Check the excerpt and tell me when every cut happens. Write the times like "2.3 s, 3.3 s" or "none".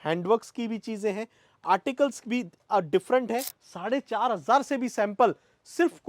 3.6 s